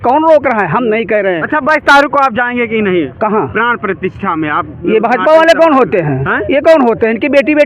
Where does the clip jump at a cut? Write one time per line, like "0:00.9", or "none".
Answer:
none